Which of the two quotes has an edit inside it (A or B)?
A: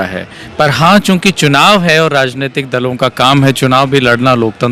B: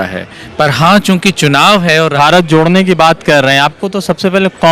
B